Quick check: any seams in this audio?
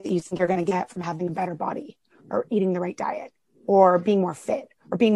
no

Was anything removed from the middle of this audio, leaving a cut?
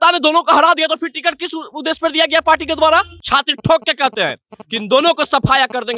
yes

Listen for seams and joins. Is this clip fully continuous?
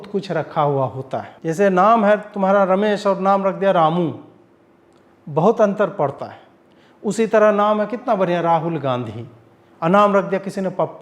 no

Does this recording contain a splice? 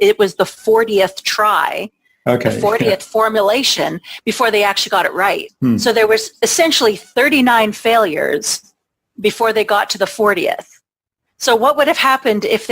yes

